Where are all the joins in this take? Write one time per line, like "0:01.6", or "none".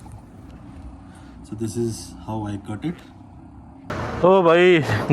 0:03.9